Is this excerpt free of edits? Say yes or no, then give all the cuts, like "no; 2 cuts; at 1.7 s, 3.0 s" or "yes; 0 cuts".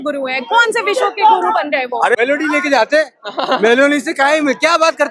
no; 1 cut; at 2.2 s